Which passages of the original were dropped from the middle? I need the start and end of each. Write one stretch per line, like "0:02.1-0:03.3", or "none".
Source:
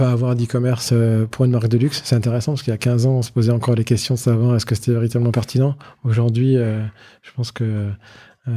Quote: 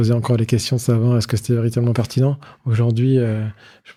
none